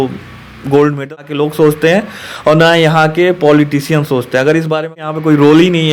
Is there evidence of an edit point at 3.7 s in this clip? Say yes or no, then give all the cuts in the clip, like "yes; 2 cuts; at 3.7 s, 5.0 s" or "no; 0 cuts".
no; 2 cuts; at 1.1 s, 5.1 s